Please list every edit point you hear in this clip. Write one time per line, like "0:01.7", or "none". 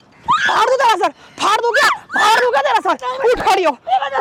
none